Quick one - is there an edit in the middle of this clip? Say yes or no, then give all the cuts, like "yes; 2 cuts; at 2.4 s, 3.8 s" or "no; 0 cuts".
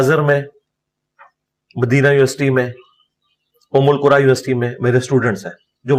no; 0 cuts